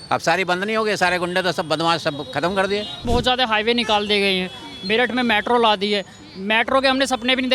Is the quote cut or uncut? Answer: cut